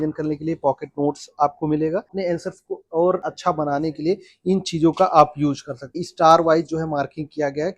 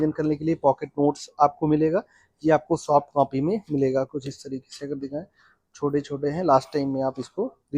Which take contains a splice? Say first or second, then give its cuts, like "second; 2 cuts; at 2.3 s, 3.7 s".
first; 3 cuts; at 2.1 s, 3.2 s, 6.0 s